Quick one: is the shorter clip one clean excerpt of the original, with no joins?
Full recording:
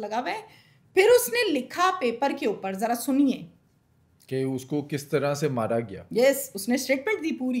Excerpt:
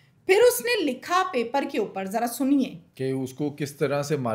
no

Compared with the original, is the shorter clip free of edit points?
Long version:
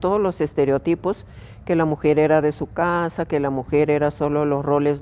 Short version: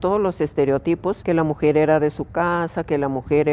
no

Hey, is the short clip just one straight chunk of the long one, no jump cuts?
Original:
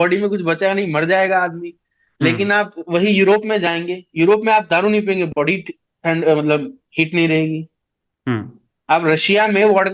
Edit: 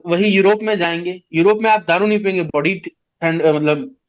yes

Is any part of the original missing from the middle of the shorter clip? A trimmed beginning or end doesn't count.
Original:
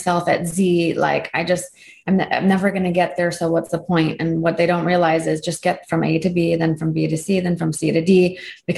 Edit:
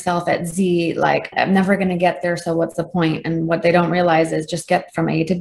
yes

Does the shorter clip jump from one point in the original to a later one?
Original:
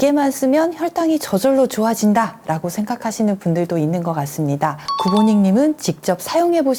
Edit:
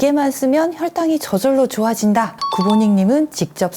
yes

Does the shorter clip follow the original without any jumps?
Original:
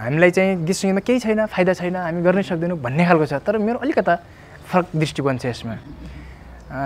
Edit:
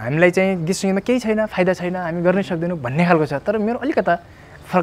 yes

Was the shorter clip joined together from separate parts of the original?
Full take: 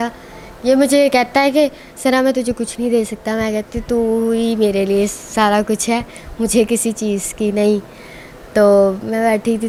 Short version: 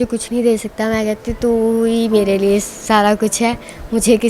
no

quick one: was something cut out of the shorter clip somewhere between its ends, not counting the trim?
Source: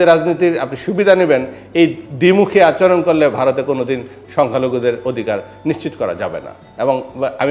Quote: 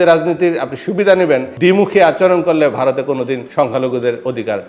yes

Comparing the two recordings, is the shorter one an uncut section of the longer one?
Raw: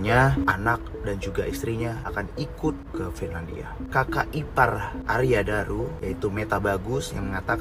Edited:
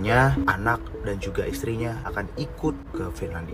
yes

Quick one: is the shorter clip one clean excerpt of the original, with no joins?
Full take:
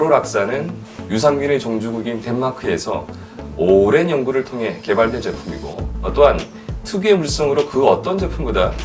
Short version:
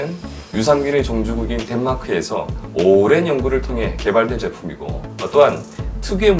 no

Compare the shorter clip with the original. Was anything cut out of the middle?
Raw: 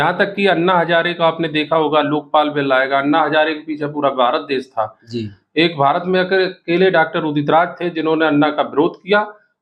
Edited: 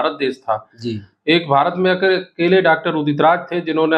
no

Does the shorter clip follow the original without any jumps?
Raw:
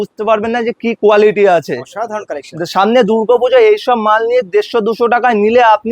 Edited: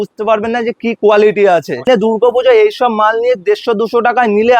no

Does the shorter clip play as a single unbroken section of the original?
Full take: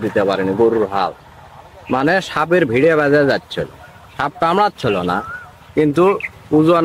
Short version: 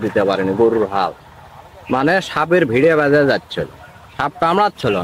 yes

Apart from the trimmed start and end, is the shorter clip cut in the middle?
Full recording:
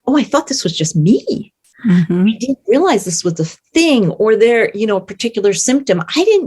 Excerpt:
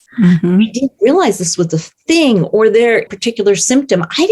yes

